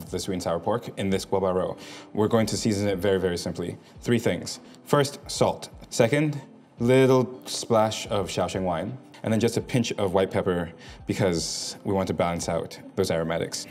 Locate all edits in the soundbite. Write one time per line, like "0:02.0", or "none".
0:05.7
0:09.1
0:12.8